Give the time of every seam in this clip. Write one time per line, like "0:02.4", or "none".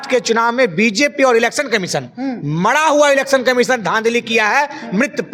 none